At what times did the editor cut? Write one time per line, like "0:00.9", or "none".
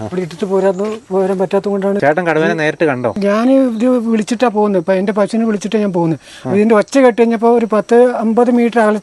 0:02.0
0:03.2